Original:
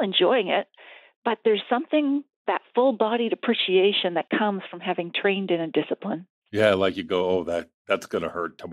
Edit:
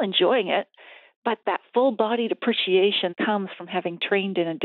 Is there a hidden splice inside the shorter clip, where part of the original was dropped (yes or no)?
yes